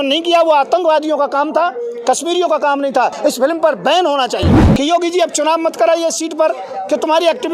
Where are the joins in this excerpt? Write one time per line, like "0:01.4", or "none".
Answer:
0:03.2
0:04.6